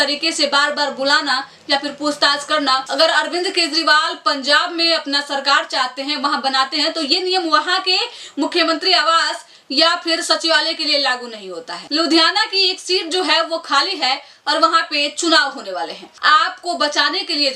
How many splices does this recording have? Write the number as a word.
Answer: three